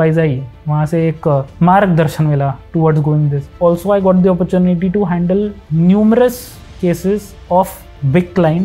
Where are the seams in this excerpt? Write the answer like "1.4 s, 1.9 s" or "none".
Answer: 1.5 s, 3.5 s